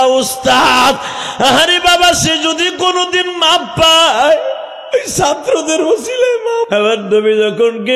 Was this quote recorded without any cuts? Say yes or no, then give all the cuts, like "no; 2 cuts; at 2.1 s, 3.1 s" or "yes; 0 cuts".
no; 1 cut; at 6.7 s